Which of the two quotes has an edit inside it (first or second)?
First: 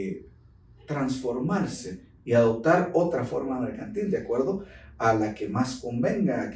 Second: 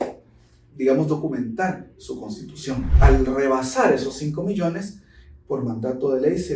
second